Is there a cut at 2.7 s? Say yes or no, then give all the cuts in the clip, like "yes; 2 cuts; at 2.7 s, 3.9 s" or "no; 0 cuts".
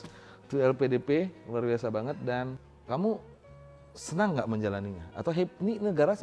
yes; 1 cut; at 2.7 s